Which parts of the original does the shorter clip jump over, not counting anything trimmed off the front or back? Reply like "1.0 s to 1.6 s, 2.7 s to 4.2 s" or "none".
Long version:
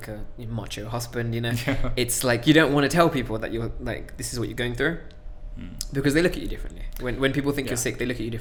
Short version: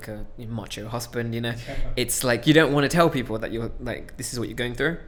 none